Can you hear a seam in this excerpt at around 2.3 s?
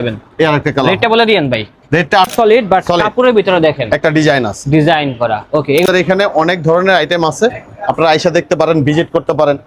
yes; 2 cuts; at 2.3 s, 5.9 s

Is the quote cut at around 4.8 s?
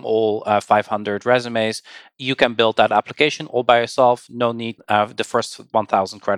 yes; 1 cut; at 4.8 s

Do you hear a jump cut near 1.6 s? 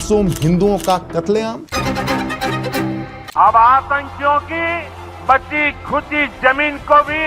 yes; 2 cuts; at 1.6 s, 3.2 s

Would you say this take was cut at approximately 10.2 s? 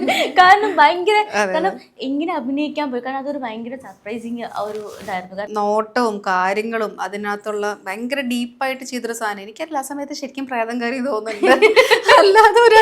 no; 1 cut; at 5.5 s

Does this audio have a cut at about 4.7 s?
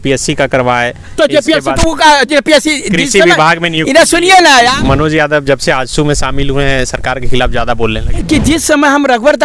yes; 2 cuts; at 4.7 s, 8.1 s

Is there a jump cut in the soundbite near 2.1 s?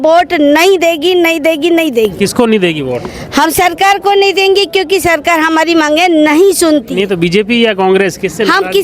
no; 0 cuts

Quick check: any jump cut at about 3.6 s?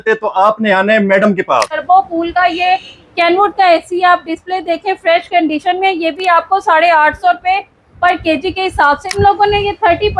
no; 2 cuts; at 1.8 s, 9.1 s

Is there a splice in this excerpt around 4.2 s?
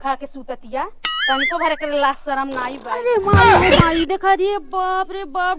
no; 1 cut; at 2.8 s

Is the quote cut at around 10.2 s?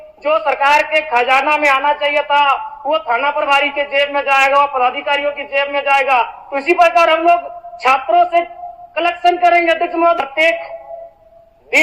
yes; 1 cut; at 10.2 s

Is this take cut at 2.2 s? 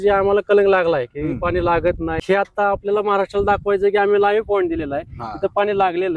yes; 1 cut; at 2.2 s

